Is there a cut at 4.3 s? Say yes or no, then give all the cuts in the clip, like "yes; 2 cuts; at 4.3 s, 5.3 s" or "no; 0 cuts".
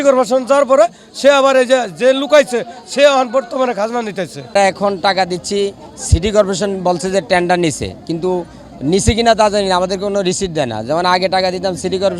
yes; 1 cut; at 4.3 s